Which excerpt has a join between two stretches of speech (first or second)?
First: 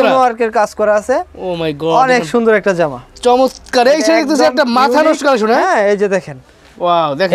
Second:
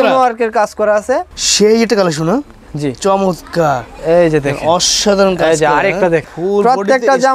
second